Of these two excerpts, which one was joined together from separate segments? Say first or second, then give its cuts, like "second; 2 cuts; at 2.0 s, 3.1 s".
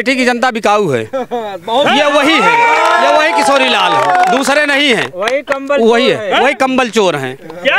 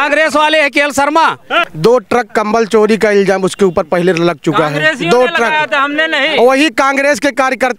second; 1 cut; at 1.6 s